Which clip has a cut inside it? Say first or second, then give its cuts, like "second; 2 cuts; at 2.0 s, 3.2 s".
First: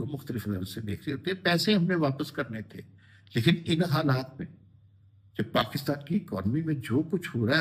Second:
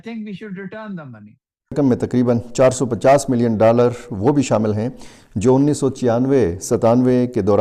second; 1 cut; at 1.8 s